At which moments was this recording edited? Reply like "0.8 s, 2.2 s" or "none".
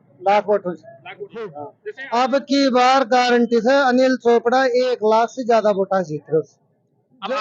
1.7 s